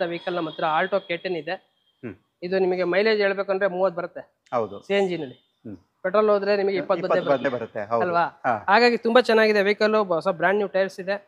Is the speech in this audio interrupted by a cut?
no; 0 cuts

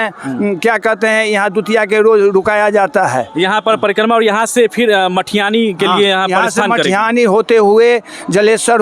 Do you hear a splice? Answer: no; 0 cuts

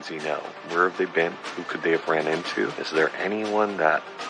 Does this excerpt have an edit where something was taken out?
yes; 1 cut; at 2.8 s

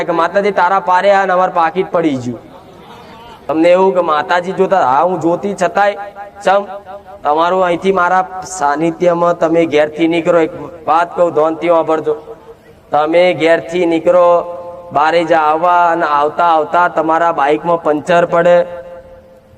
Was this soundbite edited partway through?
yes; 1 cut; at 3.5 s

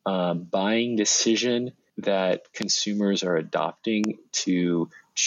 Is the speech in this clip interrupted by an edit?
yes; 1 cut; at 1.8 s

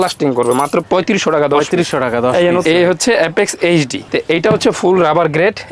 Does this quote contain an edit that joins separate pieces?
yes; 2 cuts; at 2.6 s, 4.0 s

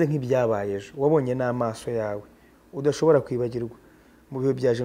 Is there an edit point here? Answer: no; 0 cuts

